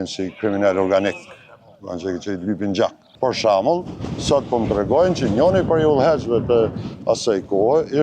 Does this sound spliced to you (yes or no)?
yes